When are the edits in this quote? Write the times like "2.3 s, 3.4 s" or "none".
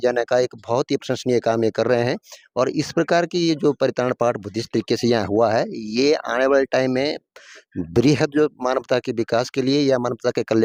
none